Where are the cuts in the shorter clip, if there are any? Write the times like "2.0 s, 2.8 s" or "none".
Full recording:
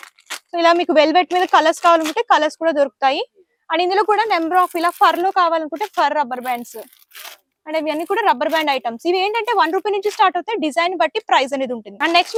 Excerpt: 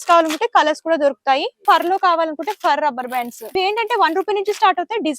1.6 s, 3.6 s